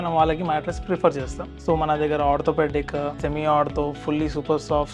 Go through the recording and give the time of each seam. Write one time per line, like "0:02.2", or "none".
0:01.4
0:03.2